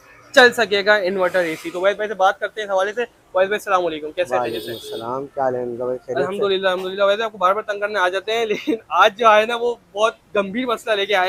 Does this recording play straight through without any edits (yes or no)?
yes